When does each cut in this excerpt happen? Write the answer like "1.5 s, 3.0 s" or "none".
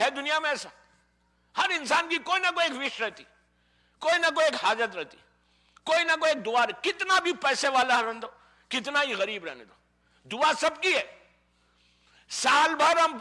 none